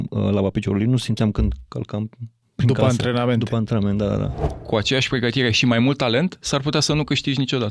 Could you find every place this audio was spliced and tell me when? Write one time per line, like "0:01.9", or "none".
0:04.5